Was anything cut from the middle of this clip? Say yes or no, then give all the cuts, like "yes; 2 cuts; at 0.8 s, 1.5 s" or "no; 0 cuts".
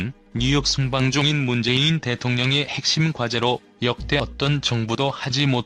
no; 0 cuts